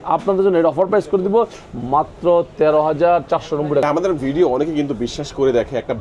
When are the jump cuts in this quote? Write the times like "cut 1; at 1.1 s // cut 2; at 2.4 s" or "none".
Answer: cut 1; at 3.8 s